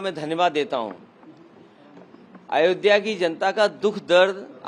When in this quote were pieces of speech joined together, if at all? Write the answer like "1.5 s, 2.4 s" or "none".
none